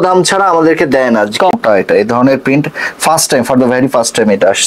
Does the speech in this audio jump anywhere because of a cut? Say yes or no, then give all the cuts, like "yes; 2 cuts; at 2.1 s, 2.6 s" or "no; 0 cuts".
no; 0 cuts